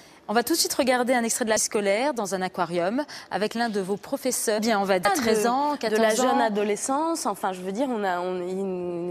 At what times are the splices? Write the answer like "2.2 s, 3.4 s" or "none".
none